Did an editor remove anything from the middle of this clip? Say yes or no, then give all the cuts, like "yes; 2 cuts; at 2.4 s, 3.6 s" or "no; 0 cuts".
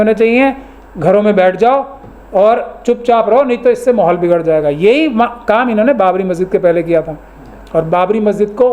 no; 0 cuts